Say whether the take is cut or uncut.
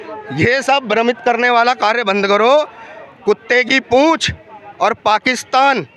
uncut